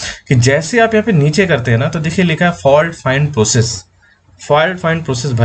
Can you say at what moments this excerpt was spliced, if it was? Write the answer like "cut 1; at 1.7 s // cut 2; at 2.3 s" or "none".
none